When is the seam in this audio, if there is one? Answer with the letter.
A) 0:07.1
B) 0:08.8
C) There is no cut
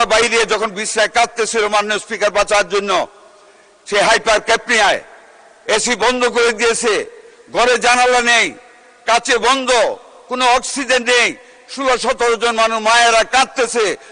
C